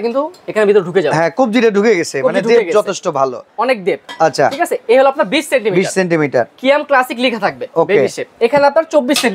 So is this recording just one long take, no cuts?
yes; 0 cuts

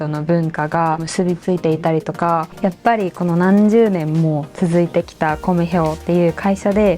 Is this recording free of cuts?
no; 2 cuts; at 1.1 s, 2.5 s

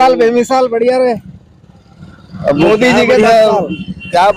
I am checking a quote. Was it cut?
no; 0 cuts

